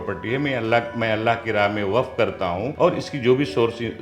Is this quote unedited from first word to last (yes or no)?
no